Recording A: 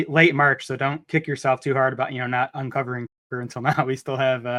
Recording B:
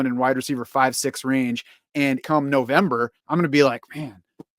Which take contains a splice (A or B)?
B